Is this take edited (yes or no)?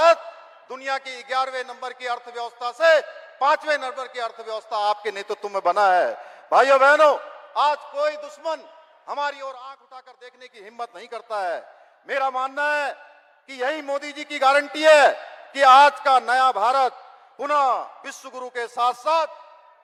no